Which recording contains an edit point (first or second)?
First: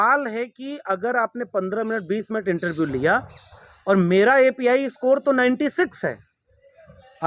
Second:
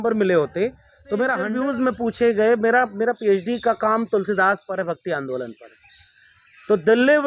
second